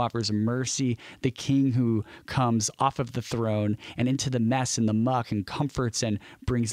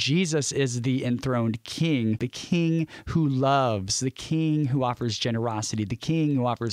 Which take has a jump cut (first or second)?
second